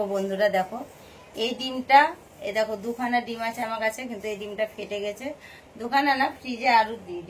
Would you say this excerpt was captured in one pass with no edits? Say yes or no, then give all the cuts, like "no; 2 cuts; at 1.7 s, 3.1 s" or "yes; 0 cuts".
yes; 0 cuts